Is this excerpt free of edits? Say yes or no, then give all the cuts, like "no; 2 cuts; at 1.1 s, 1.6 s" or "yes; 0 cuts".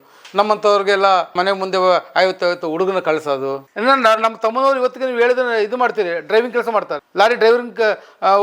no; 2 cuts; at 1.3 s, 3.7 s